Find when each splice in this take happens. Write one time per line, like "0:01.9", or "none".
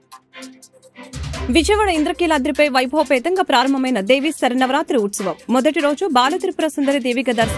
0:01.5